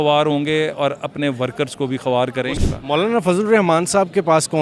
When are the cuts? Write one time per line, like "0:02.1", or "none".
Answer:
0:02.6